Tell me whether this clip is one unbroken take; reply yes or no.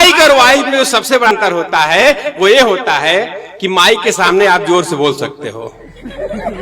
no